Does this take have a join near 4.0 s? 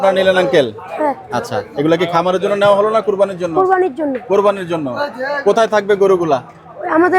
no; 0 cuts

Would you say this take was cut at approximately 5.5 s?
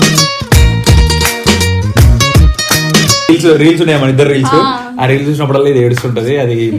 no; 1 cut; at 3.3 s

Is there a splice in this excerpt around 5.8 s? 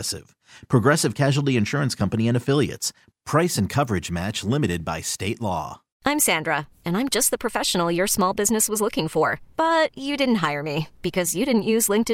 yes; 1 cut; at 5.8 s

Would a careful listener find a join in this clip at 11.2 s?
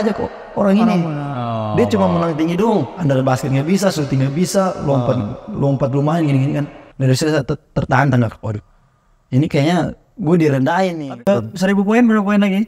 yes; 1 cut; at 11.2 s

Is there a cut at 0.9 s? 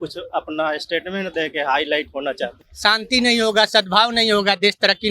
no; 1 cut; at 2.6 s

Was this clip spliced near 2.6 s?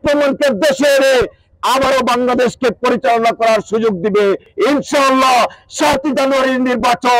no; 1 cut; at 4.5 s

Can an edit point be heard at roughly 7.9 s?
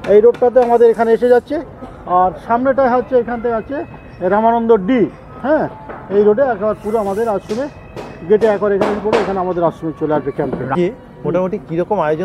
no; 1 cut; at 10.7 s

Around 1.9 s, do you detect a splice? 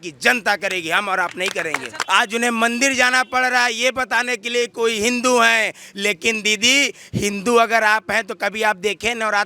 yes; 1 cut; at 1.9 s

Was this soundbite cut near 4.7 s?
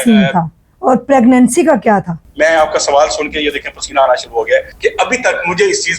yes; 2 cuts; at 2.2 s, 4.7 s

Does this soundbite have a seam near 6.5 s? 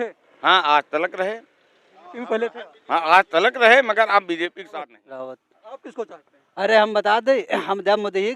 no; 1 cut; at 4.8 s

